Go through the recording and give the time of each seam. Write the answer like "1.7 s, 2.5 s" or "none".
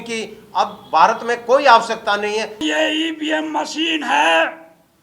2.6 s